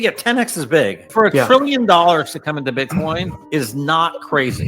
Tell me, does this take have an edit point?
yes; 2 cuts; at 1.0 s, 3.4 s

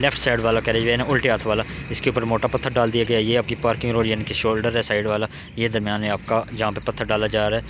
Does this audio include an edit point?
no; 0 cuts

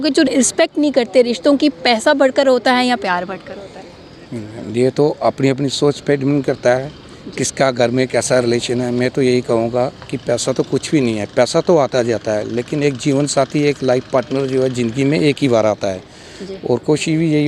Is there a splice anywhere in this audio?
no; 0 cuts

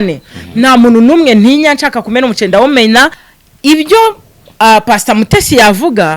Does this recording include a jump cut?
yes; 1 cut; at 3.2 s

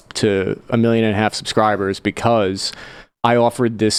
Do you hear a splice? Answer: no; 0 cuts

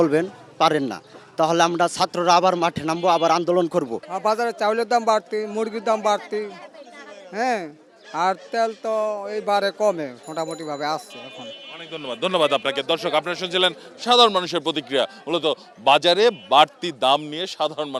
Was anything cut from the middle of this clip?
no; 0 cuts

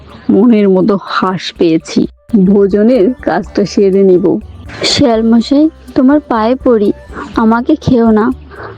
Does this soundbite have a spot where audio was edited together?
yes; 1 cut; at 2.2 s

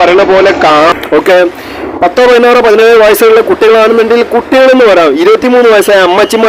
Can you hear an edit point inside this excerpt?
yes; 1 cut; at 0.9 s

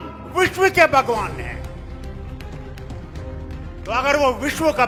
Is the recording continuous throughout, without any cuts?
yes; 0 cuts

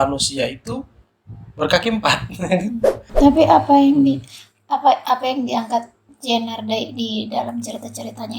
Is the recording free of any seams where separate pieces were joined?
no; 1 cut; at 3.0 s

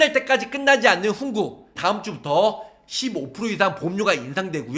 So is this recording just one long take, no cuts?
yes; 0 cuts

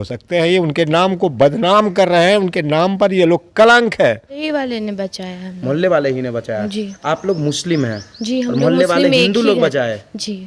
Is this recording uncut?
no; 1 cut; at 4.4 s

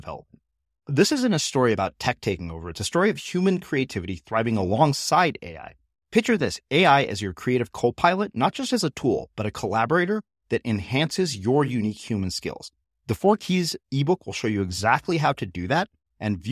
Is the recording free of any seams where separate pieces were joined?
yes; 0 cuts

